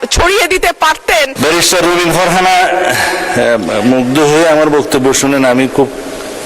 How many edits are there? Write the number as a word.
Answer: one